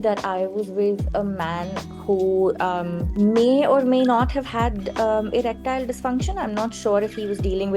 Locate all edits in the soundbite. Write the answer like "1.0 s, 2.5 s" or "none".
3.0 s